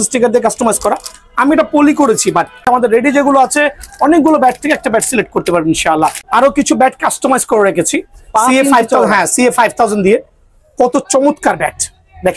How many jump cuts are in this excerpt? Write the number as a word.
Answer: two